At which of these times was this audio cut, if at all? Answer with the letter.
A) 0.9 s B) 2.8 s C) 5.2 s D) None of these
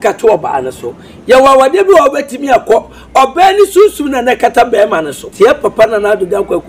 C